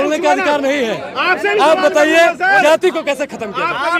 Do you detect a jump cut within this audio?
no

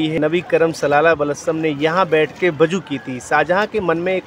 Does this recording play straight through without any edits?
yes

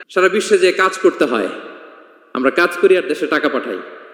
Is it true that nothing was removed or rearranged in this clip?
yes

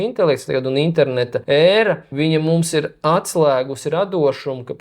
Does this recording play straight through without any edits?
no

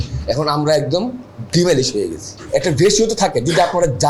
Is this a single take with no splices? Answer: no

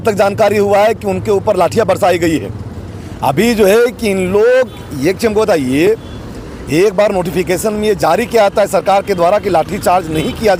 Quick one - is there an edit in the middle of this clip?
no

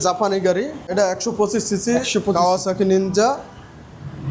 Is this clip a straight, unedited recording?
no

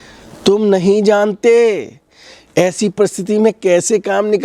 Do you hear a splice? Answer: no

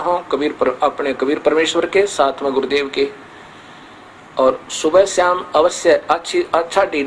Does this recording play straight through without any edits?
yes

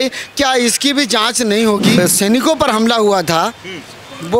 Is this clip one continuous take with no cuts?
no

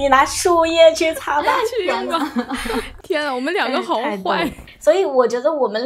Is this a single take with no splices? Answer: no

